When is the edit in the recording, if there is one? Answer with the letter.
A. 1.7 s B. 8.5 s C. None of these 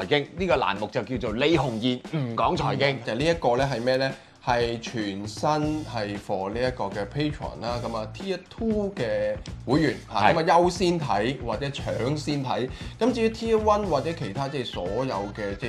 C